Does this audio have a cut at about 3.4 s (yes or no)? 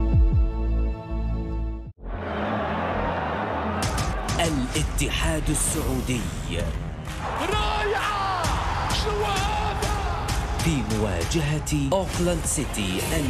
no